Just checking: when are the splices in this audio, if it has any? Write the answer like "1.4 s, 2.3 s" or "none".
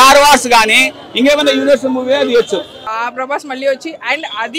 2.9 s